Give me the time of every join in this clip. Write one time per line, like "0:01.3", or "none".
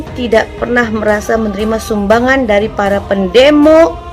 none